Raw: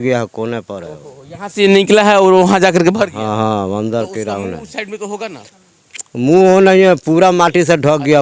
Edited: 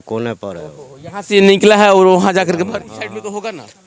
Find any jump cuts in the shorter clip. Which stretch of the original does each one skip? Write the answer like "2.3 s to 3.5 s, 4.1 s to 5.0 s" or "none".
3.1 s to 4.6 s